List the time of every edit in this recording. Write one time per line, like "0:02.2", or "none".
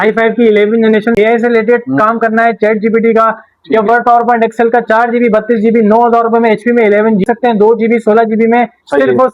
0:01.1
0:07.2